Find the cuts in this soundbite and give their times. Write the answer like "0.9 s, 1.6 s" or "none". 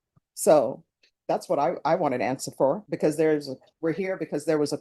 2.9 s, 3.6 s